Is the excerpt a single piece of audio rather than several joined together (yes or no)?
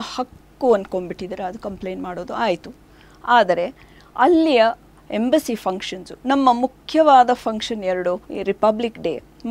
no